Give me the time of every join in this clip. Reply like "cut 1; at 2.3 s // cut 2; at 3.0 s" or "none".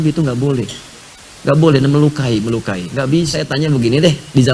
cut 1; at 3.4 s